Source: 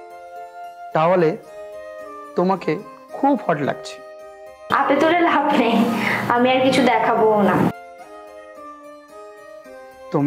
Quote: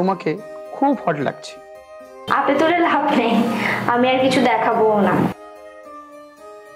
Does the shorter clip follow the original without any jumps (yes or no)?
no